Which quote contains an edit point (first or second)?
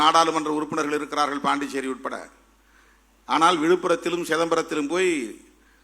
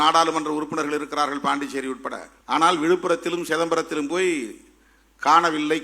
second